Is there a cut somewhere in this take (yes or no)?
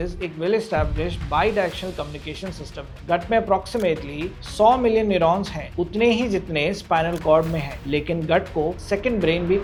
no